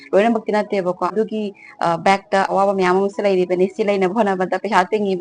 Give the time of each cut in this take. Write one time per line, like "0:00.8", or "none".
0:01.1
0:02.5